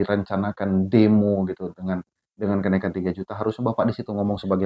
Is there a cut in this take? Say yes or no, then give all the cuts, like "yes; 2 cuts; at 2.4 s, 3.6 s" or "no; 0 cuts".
no; 0 cuts